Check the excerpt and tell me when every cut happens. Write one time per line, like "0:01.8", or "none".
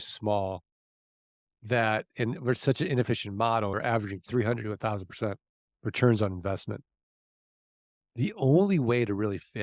0:03.8

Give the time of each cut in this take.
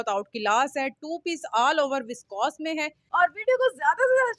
0:03.0

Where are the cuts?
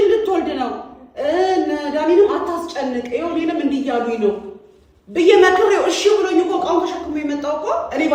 none

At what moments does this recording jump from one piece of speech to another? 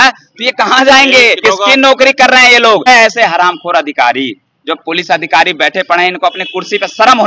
0:01.4
0:02.9

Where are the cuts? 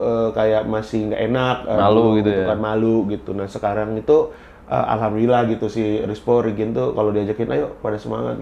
none

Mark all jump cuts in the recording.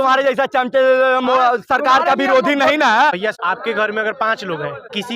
0:03.4

